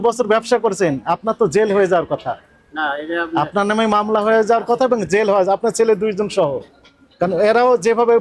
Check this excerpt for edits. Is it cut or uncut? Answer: uncut